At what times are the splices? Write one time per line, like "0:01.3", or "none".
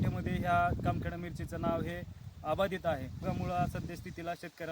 0:03.2